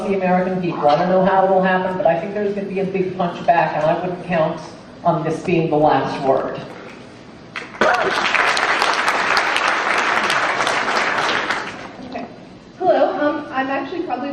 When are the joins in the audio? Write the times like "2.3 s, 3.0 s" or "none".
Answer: none